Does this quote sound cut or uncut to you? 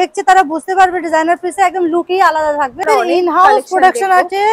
cut